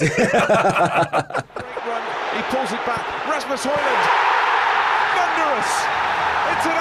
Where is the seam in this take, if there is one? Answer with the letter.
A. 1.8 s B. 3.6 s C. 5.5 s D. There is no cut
A